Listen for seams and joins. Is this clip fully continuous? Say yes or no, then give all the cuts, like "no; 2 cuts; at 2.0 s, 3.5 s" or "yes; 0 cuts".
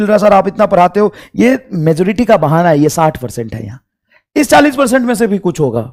yes; 0 cuts